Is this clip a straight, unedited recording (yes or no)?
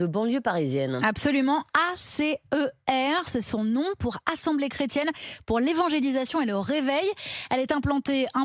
yes